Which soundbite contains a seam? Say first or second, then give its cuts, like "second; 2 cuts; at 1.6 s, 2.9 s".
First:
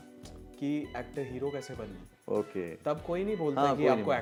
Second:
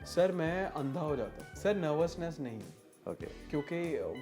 second; 1 cut; at 1.4 s